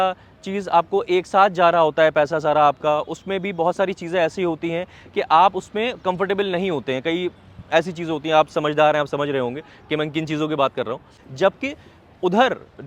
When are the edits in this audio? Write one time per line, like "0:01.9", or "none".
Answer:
0:11.2